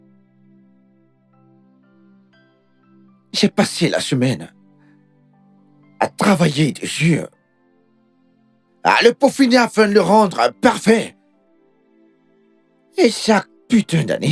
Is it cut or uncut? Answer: cut